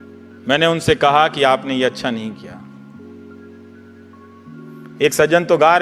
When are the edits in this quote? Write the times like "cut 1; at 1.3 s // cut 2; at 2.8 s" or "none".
cut 1; at 2.8 s // cut 2; at 4.4 s